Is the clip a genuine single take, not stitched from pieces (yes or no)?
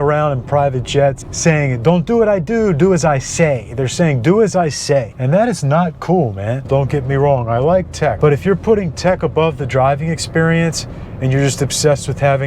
no